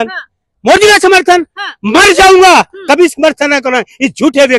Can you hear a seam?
no; 0 cuts

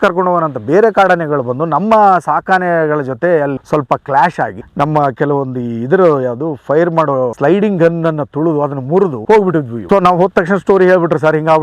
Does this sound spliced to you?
no; 0 cuts

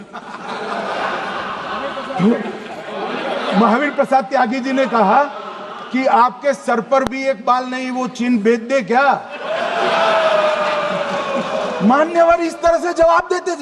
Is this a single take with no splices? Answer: yes; 0 cuts

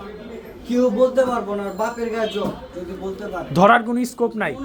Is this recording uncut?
yes; 0 cuts

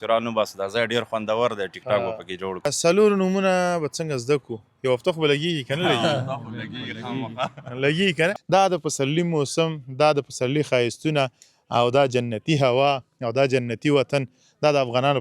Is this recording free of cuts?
no; 2 cuts; at 2.7 s, 8.3 s

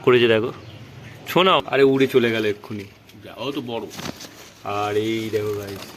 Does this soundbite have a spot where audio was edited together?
yes; 1 cut; at 1.6 s

